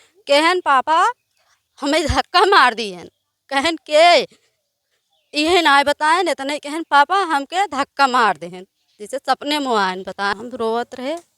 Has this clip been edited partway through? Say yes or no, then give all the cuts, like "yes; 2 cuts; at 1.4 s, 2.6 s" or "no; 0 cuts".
yes; 1 cut; at 10.3 s